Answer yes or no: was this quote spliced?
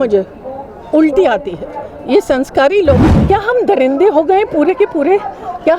yes